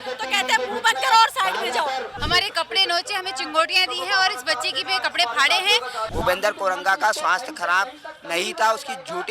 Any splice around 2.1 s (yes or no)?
yes